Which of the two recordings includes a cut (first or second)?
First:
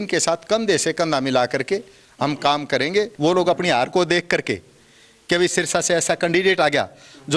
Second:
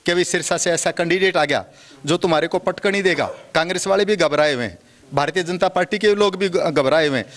first